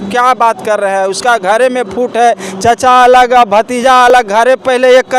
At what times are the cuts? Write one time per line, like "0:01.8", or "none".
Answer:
none